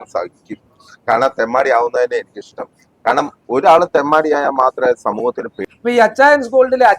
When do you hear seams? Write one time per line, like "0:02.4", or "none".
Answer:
0:05.6